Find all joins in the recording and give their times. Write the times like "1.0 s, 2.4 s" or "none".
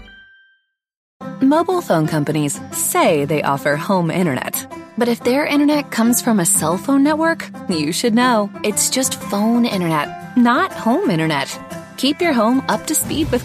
1.1 s